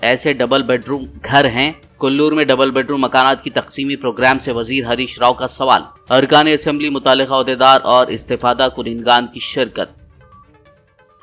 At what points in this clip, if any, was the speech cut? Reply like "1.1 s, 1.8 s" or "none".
none